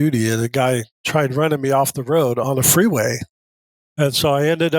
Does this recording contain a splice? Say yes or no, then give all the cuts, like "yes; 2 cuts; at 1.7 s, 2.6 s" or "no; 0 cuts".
yes; 1 cut; at 1.0 s